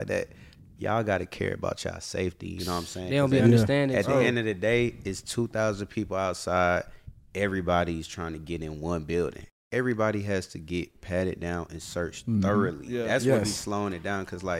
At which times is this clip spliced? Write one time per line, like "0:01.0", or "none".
0:09.4

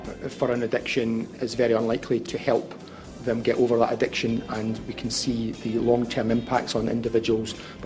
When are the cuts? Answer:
0:01.3
0:02.3

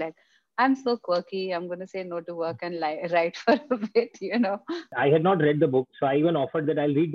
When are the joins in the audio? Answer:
0:04.8

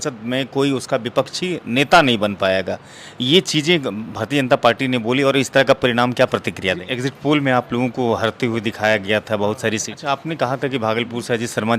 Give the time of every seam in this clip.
0:06.9
0:09.9

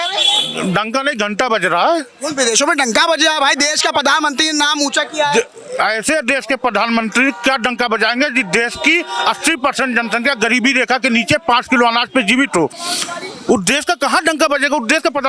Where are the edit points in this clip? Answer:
none

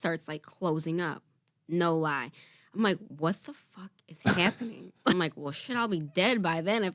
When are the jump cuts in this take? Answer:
0:05.1

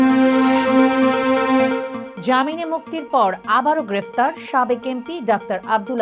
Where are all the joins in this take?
0:02.0

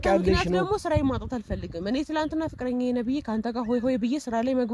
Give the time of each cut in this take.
none

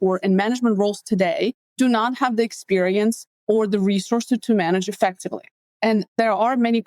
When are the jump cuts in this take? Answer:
0:01.6
0:03.3
0:06.0

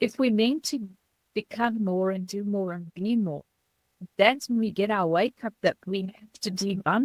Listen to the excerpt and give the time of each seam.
none

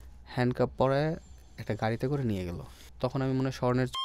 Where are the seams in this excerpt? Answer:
0:02.8

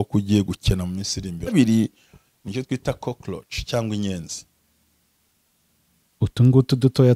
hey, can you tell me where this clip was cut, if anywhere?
0:01.5

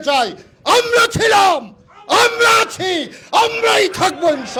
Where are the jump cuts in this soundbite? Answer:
none

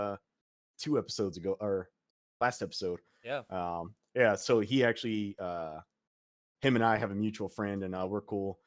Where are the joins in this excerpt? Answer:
none

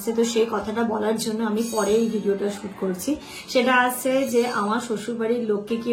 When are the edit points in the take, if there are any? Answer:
none

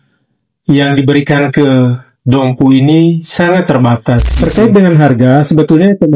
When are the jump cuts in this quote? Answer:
0:04.3

